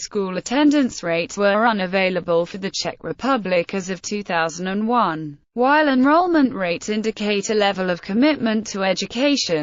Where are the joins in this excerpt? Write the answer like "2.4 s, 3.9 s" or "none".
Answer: 3.3 s